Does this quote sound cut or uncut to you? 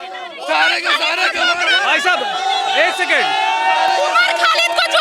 uncut